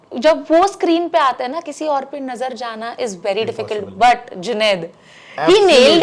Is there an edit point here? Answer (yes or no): no